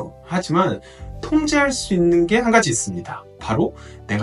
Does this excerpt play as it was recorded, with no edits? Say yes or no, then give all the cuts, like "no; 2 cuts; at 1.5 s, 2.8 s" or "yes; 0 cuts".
yes; 0 cuts